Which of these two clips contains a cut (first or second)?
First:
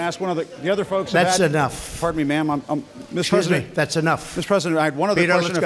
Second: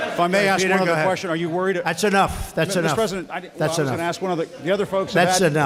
first